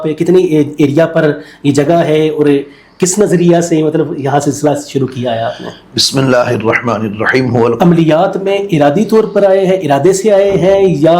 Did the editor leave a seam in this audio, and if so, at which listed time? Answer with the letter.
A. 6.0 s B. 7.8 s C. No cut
B